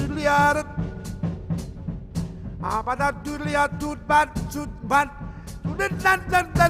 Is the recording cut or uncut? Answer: uncut